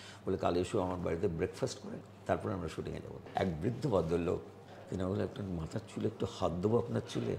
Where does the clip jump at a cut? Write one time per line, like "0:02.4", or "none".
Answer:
0:03.3
0:04.6